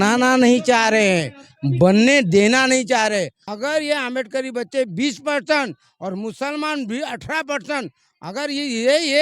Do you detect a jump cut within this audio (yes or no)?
yes